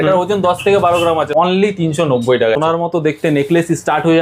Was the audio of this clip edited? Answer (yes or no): yes